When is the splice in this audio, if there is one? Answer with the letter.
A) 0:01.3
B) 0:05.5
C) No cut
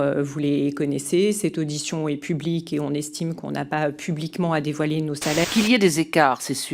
B